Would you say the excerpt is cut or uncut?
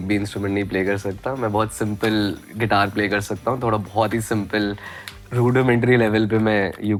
uncut